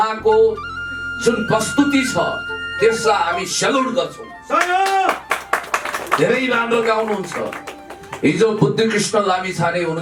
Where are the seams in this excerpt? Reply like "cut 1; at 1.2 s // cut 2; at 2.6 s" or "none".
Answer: none